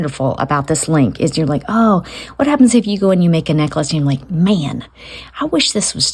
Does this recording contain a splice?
no; 0 cuts

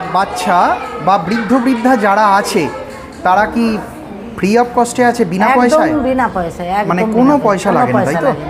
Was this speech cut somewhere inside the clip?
no; 0 cuts

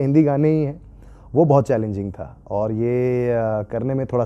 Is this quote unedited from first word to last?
yes; 0 cuts

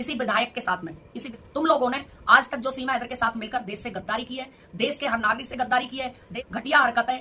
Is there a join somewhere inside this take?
yes; 2 cuts; at 1.2 s, 6.2 s

